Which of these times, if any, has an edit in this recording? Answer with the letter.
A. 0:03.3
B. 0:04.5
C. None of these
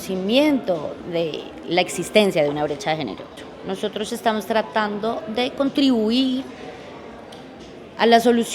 A